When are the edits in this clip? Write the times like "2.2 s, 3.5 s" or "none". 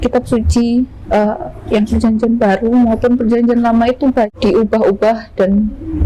4.3 s